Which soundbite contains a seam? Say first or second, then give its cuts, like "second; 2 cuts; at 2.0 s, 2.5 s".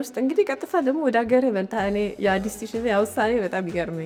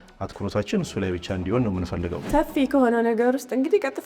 second; 1 cut; at 2.3 s